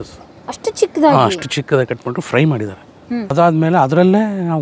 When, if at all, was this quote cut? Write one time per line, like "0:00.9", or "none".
0:03.3